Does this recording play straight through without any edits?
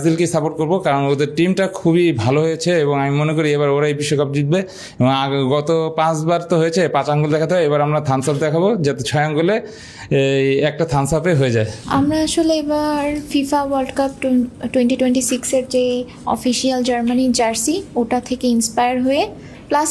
yes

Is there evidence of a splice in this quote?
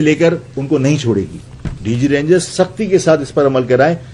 no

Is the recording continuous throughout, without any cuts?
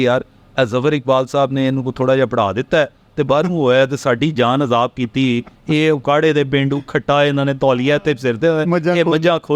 yes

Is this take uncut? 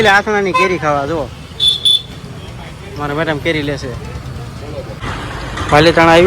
no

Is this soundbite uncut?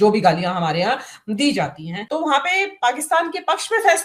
no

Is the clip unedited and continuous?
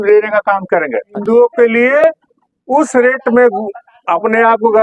no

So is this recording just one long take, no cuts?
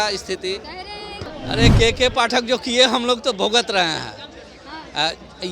no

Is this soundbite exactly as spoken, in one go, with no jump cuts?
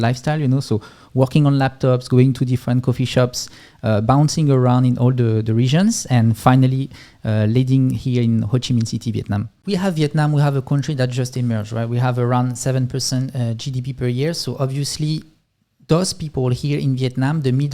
no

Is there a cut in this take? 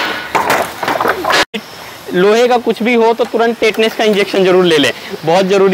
yes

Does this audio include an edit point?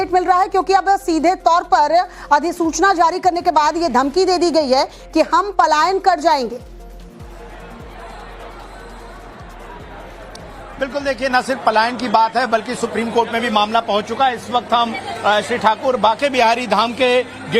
yes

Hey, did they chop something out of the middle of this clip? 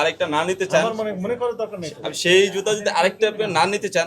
no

